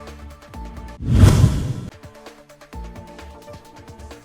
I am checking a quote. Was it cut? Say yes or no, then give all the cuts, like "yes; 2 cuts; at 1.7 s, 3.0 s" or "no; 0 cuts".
yes; 1 cut; at 1.0 s